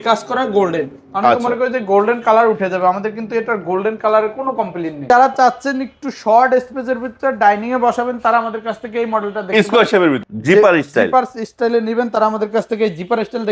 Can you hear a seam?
yes; 2 cuts; at 5.1 s, 10.2 s

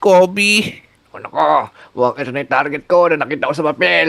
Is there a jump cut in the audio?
yes; 1 cut; at 1.2 s

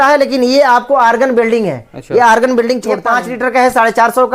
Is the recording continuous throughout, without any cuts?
no; 1 cut; at 3.0 s

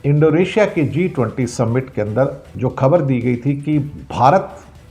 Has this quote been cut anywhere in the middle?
yes; 2 cuts; at 2.4 s, 4.0 s

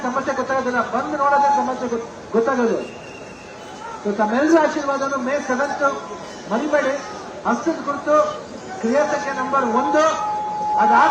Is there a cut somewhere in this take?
yes; 1 cut; at 6.4 s

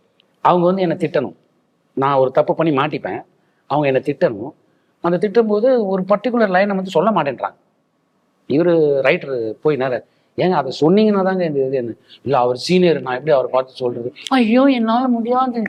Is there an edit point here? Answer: no; 0 cuts

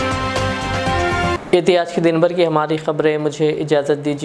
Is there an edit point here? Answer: no; 0 cuts

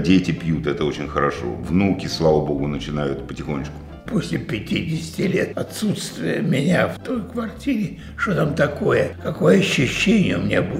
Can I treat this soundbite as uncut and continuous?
no; 4 cuts; at 3.9 s, 5.5 s, 7.0 s, 9.2 s

